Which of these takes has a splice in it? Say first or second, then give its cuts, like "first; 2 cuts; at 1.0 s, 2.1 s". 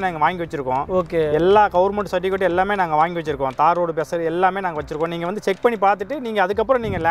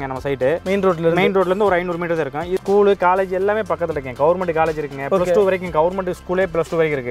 second; 1 cut; at 2.6 s